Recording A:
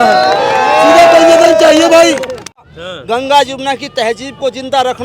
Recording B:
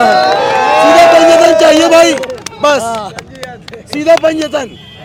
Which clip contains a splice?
A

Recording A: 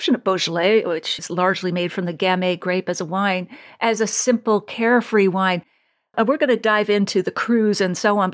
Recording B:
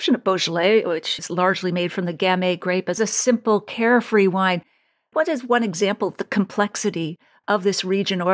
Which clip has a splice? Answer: B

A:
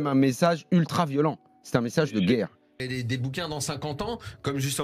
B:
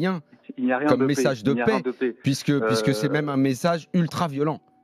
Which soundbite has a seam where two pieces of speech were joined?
A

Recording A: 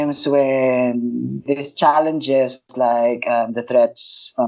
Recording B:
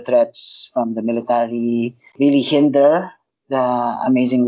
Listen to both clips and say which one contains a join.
B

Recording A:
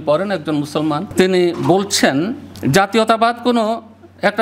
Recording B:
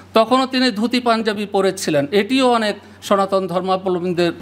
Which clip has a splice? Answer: A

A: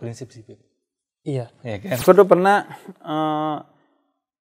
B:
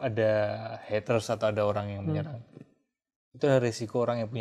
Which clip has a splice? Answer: A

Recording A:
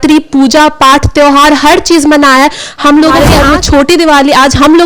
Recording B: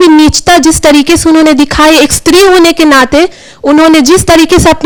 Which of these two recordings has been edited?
A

